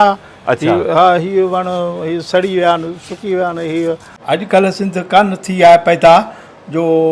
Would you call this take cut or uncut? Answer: cut